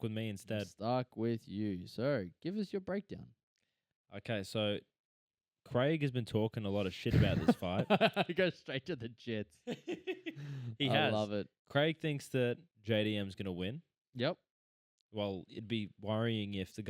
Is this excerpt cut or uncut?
uncut